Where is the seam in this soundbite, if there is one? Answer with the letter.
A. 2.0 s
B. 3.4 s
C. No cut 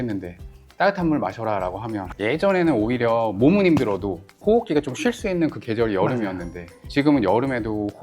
A